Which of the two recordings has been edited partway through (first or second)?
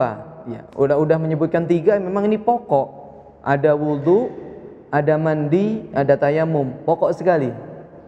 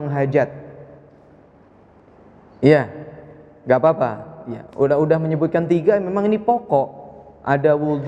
second